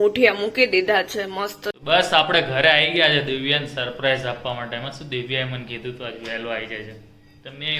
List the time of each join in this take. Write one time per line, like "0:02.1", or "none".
0:01.9